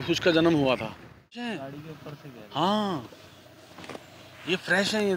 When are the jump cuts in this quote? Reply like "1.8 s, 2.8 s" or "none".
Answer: 1.6 s

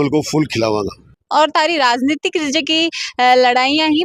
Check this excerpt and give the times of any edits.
1.2 s

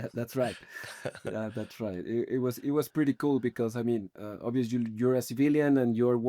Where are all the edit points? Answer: none

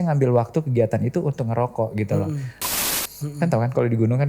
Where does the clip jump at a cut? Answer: 2.7 s

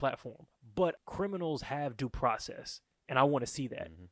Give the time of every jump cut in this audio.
1.0 s

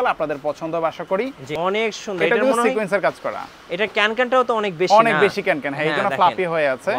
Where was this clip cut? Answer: 1.4 s

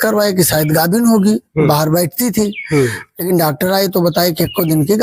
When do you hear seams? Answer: none

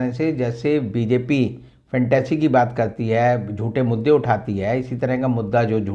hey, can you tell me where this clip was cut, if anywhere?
none

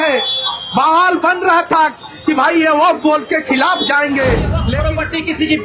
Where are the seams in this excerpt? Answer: 4.7 s

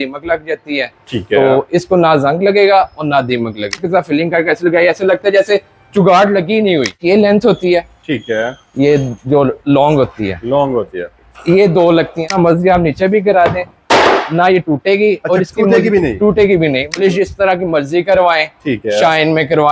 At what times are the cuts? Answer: 3.8 s, 7.0 s, 12.3 s, 17.0 s

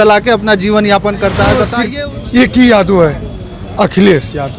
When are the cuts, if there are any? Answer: 1.8 s

